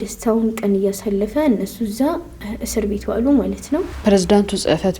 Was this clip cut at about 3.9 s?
yes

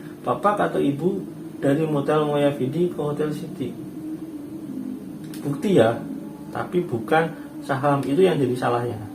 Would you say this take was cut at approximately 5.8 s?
no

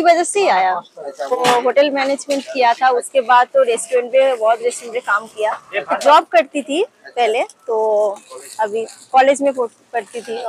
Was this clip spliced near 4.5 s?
no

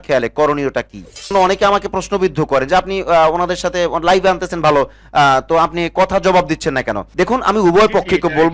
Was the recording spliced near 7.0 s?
yes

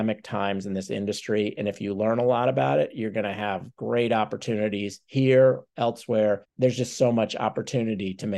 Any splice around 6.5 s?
yes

